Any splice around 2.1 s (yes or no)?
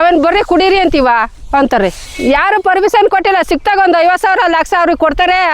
yes